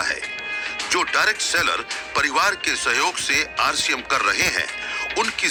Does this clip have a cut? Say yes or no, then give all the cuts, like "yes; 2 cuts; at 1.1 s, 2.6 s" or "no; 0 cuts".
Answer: no; 0 cuts